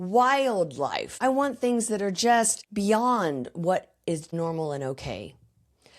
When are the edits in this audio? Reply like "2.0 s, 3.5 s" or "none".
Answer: 1.2 s, 2.6 s, 4.3 s